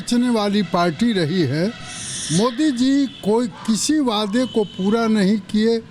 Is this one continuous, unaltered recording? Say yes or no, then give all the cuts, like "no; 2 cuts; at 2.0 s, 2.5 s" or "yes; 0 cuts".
yes; 0 cuts